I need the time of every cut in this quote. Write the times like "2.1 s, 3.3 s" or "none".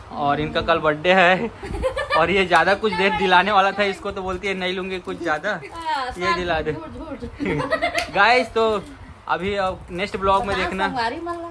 none